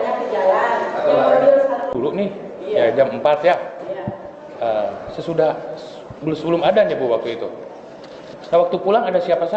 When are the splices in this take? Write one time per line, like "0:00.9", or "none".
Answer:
none